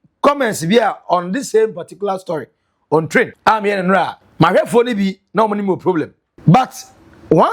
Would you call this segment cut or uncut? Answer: cut